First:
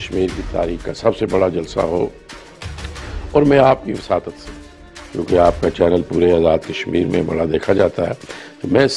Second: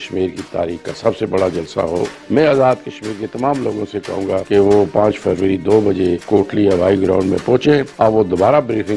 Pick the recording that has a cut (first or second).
second